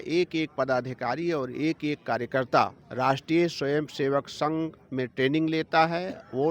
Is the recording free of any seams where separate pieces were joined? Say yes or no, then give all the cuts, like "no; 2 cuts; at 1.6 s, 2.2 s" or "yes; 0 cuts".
no; 1 cut; at 2.8 s